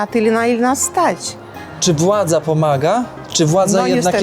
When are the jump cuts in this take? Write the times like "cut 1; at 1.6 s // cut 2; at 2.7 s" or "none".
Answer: cut 1; at 1.4 s

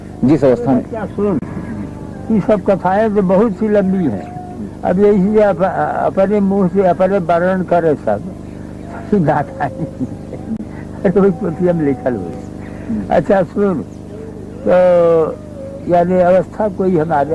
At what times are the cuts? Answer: none

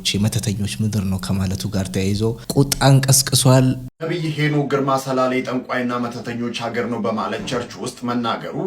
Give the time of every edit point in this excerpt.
cut 1; at 2.4 s // cut 2; at 3.9 s

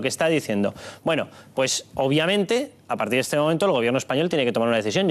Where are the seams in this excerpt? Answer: cut 1; at 3.8 s

